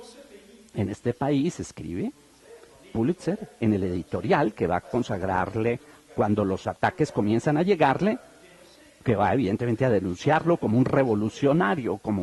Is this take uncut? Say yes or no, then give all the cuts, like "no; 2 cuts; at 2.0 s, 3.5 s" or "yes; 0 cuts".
no; 1 cut; at 6.0 s